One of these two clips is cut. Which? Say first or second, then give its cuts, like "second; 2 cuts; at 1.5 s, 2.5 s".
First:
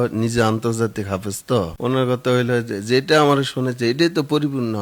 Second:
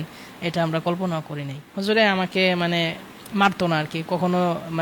second; 1 cut; at 1.7 s